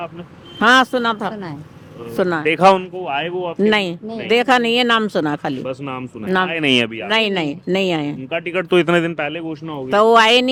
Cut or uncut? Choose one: uncut